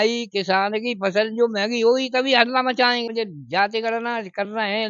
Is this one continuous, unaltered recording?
no; 1 cut; at 3.1 s

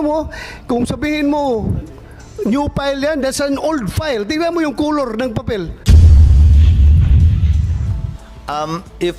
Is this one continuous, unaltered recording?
no; 2 cuts; at 5.7 s, 8.0 s

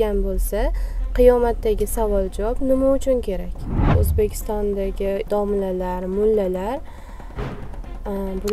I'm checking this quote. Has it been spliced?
yes; 1 cut; at 3.9 s

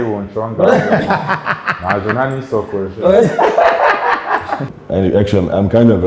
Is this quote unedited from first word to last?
no; 1 cut; at 4.7 s

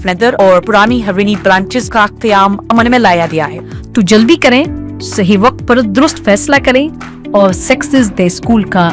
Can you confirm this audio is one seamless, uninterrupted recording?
no; 1 cut; at 3.6 s

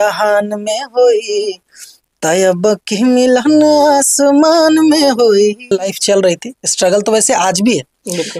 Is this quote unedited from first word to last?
no; 1 cut; at 5.9 s

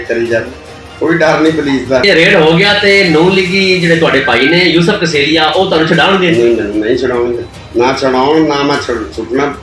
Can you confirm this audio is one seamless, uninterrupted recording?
yes; 0 cuts

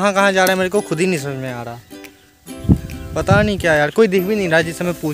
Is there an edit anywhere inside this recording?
no; 0 cuts

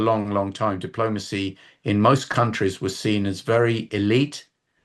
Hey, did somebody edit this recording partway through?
no; 0 cuts

